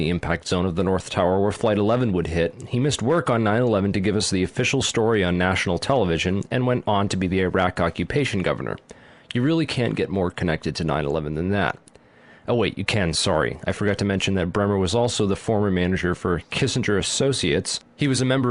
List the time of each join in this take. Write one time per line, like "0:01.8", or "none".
none